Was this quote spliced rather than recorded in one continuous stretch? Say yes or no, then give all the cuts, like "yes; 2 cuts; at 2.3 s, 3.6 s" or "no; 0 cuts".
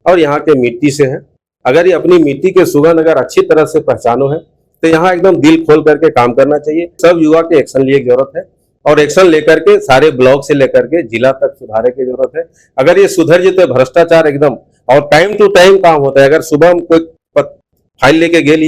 yes; 1 cut; at 7.0 s